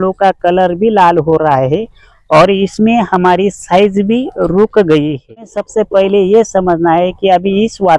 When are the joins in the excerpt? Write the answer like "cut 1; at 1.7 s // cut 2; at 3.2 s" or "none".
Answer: cut 1; at 5.6 s